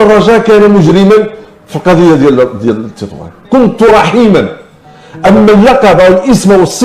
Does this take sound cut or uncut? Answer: uncut